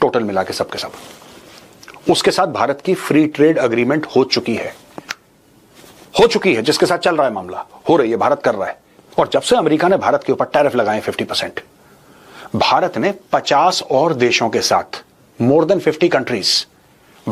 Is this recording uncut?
yes; 0 cuts

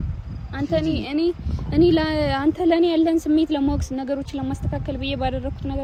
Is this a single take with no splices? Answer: yes; 0 cuts

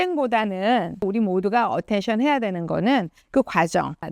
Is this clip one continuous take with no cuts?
no; 1 cut; at 1.0 s

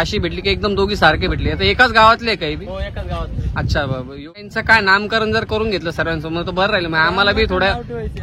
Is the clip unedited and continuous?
no; 1 cut; at 4.4 s

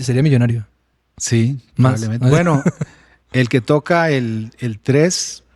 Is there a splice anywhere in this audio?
no; 0 cuts

